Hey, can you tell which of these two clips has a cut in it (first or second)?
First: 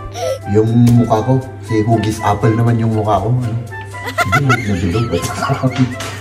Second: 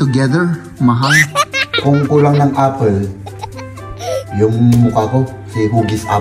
second